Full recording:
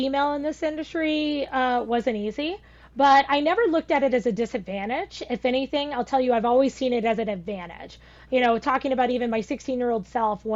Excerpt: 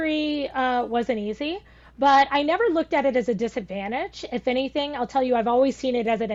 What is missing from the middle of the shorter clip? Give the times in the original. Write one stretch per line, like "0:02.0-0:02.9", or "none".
none